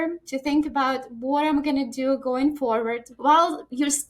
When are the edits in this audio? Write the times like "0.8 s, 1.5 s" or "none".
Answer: 3.1 s